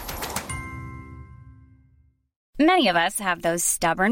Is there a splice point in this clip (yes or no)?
yes